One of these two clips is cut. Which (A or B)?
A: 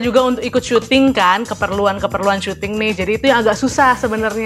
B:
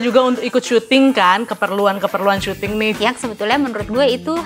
B